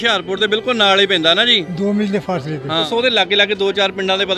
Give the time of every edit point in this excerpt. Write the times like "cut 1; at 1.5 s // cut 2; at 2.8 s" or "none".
cut 1; at 2.8 s